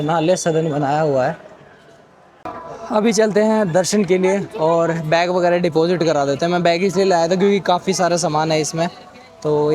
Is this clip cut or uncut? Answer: cut